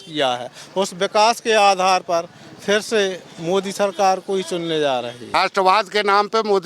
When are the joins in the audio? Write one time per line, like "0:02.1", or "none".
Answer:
0:05.2